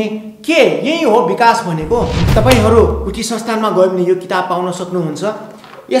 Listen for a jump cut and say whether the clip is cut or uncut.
cut